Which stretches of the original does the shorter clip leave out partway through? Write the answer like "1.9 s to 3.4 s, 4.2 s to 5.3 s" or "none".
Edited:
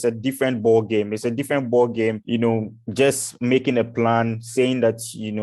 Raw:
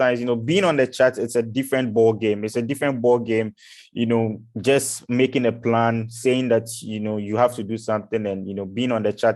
3.5 s to 3.9 s